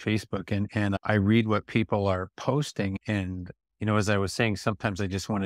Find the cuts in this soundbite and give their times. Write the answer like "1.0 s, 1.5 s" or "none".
1.0 s